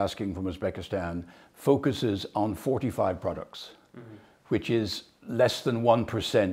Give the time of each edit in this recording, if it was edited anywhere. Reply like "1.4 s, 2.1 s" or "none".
none